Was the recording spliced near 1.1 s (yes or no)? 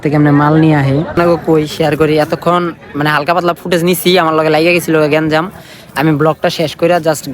yes